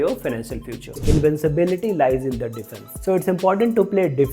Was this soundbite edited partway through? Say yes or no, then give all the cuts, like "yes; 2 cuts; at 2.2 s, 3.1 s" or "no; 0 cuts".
yes; 1 cut; at 1.0 s